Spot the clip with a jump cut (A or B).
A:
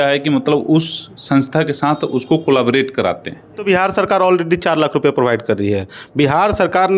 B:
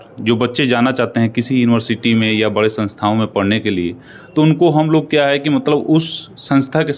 A